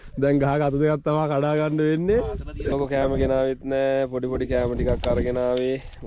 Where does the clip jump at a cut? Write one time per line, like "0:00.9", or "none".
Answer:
0:02.7